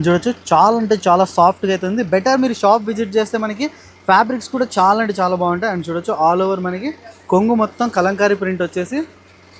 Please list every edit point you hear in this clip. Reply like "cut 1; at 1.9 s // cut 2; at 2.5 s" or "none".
none